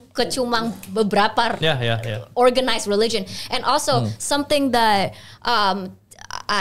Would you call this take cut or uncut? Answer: uncut